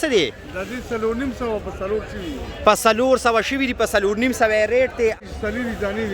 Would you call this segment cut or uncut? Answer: cut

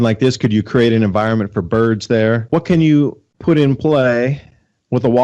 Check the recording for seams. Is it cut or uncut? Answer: cut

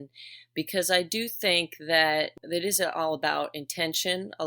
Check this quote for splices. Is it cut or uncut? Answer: cut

